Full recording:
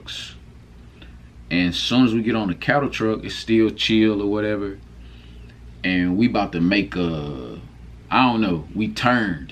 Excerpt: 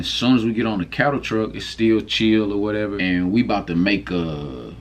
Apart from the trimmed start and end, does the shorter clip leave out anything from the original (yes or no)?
yes